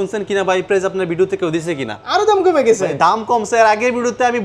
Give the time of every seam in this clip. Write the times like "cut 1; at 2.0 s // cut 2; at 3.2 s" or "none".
cut 1; at 2.0 s